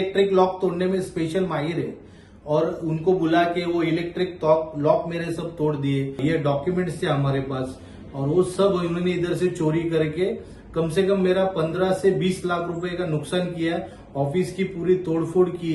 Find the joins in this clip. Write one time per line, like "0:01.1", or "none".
0:06.2